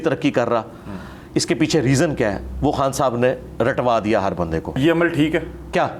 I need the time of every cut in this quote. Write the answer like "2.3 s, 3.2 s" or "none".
4.8 s